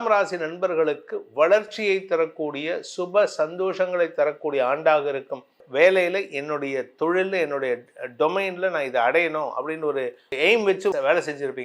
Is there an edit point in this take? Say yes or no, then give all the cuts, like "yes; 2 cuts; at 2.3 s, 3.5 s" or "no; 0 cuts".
yes; 1 cut; at 5.6 s